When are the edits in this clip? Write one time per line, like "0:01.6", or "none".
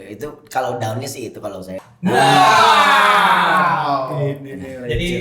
0:01.8